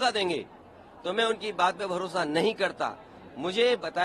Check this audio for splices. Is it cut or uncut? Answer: uncut